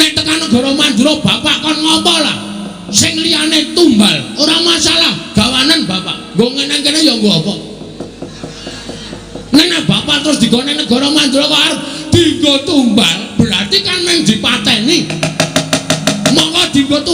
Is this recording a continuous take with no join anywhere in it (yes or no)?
yes